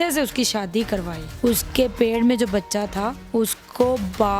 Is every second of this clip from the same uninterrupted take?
no; 2 cuts; at 1.2 s, 3.2 s

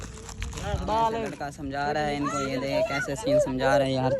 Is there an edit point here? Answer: yes; 1 cut; at 1.3 s

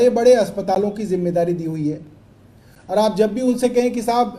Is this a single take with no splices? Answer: yes; 0 cuts

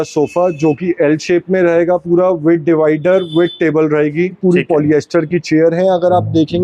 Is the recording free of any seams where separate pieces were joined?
no; 1 cut; at 4.4 s

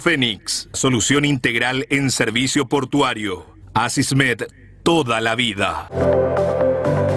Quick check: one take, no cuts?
no; 1 cut; at 5.8 s

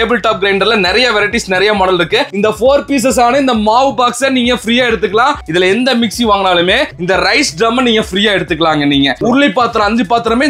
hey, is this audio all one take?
no; 3 cuts; at 2.3 s, 5.4 s, 9.2 s

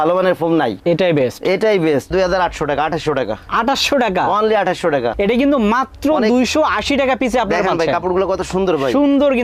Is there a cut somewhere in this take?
yes; 2 cuts; at 2.1 s, 5.1 s

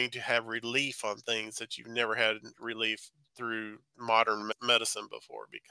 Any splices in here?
yes; 1 cut; at 4.5 s

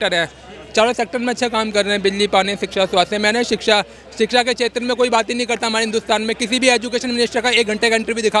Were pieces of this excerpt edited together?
no; 0 cuts

